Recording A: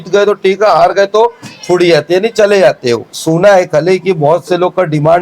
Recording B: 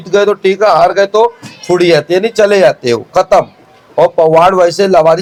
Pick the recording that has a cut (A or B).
A